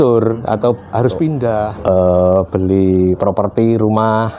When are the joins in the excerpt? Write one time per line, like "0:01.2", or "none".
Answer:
0:01.7